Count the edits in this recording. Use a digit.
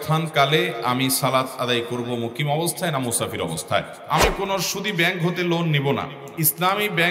2